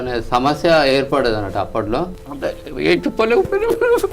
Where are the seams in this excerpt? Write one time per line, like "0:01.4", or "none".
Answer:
0:02.2